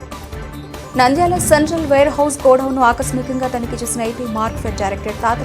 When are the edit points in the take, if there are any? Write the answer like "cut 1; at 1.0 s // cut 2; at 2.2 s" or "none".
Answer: cut 1; at 0.9 s